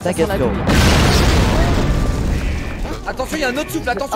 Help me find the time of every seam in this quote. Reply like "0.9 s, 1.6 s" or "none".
2.9 s